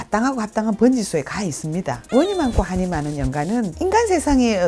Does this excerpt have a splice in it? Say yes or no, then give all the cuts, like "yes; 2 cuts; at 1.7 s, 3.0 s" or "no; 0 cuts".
yes; 1 cut; at 2.0 s